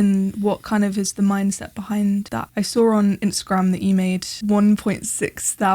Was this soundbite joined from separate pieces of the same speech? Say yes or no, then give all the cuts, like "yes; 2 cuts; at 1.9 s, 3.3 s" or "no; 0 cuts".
yes; 2 cuts; at 2.3 s, 4.3 s